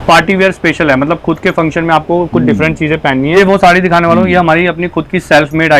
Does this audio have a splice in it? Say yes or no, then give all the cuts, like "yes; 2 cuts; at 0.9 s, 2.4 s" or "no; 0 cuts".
yes; 1 cut; at 3.3 s